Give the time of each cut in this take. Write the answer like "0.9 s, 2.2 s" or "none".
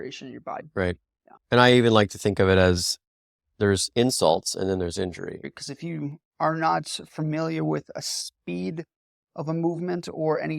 5.4 s